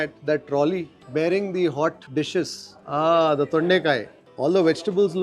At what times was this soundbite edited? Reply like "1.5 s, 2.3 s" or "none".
4.2 s